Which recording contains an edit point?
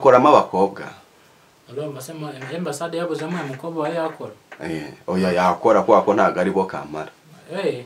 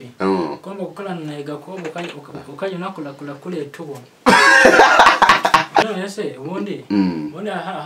second; 1 cut; at 5.9 s

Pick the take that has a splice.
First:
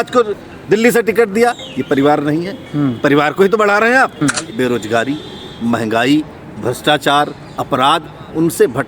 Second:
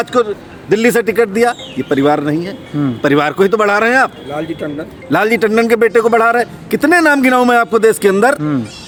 first; 1 cut; at 4.2 s

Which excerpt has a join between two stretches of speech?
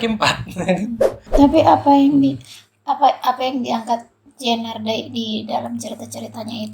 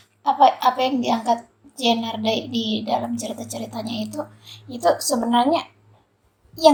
first; 1 cut; at 1.2 s

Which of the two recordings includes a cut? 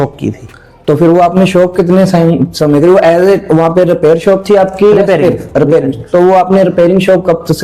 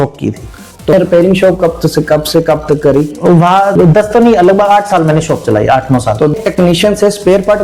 second; 3 cuts; at 0.9 s, 3.7 s, 6.3 s

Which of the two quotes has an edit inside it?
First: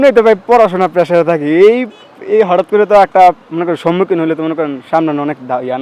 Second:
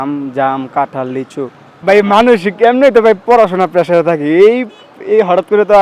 second; 1 cut; at 1.7 s

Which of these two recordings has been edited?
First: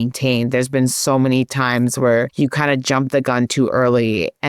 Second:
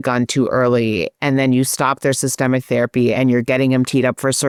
first; 1 cut; at 2.3 s

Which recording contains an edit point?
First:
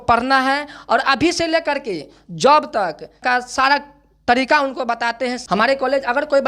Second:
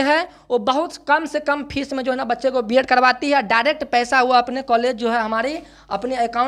first; 2 cuts; at 3.2 s, 5.4 s

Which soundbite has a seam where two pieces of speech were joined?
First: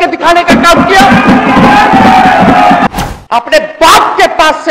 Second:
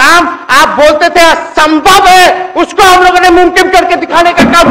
first; 1 cut; at 2.9 s

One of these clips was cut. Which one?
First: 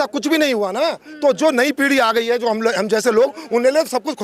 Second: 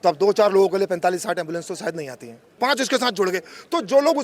second; 1 cut; at 2.5 s

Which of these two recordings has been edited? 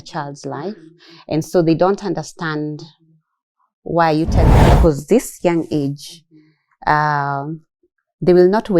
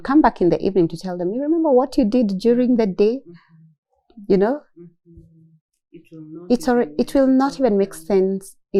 first; 1 cut; at 4.5 s

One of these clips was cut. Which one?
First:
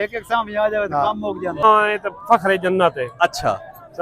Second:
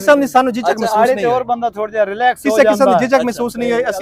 first; 1 cut; at 1.6 s

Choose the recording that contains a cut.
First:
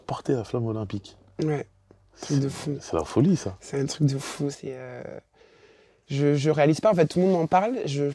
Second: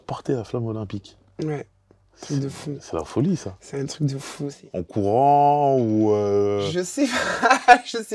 second; 1 cut; at 4.8 s

